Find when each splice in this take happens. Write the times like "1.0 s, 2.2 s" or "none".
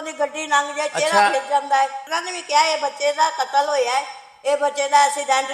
2.1 s